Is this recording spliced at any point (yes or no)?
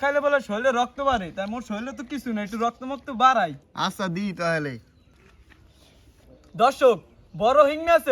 no